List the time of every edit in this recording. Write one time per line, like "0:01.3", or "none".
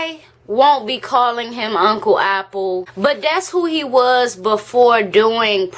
0:02.9